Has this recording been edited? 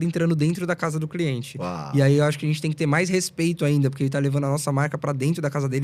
no; 0 cuts

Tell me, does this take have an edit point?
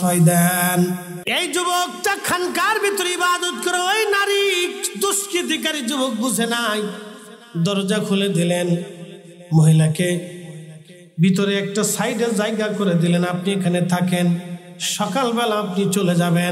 yes; 1 cut; at 1.1 s

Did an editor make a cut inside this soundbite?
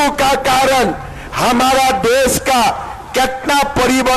no; 0 cuts

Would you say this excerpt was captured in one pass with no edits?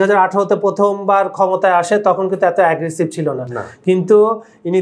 yes; 0 cuts

